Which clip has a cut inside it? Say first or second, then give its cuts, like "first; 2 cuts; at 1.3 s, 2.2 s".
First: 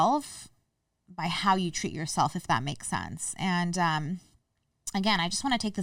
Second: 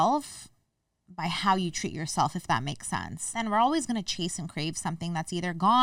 second; 1 cut; at 3.3 s